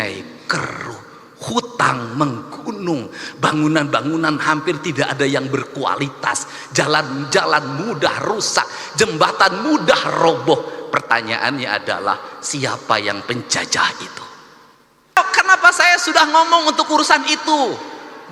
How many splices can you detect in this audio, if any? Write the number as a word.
one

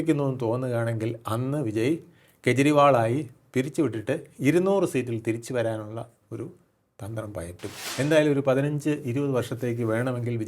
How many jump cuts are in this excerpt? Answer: one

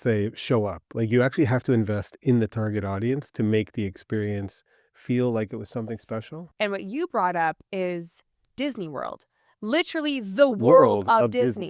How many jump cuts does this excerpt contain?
one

